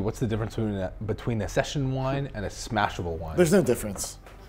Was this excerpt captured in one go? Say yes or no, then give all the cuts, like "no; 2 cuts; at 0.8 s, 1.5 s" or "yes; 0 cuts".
no; 1 cut; at 1.5 s